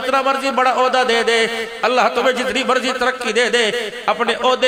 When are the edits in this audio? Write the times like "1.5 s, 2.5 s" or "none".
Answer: none